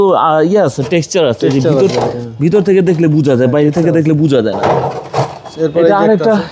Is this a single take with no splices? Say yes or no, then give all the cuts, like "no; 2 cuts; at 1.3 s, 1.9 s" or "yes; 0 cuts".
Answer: yes; 0 cuts